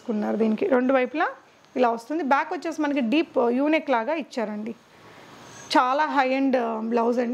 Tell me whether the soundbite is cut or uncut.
uncut